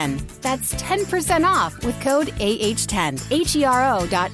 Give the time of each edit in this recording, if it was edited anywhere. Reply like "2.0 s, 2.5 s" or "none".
3.2 s